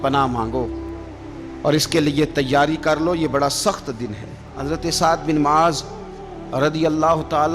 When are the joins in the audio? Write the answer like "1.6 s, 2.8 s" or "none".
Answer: 4.5 s